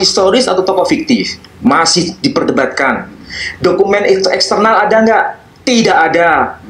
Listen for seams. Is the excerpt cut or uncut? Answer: uncut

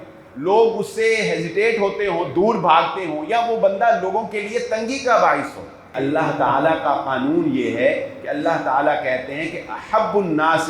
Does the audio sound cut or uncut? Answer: cut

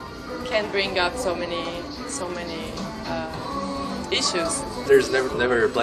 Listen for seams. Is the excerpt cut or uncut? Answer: cut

